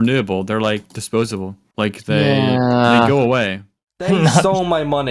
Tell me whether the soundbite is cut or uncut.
cut